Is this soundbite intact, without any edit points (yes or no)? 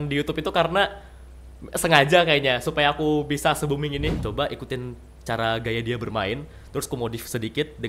no